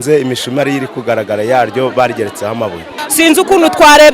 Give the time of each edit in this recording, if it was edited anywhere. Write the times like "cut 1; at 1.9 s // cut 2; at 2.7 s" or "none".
cut 1; at 3.0 s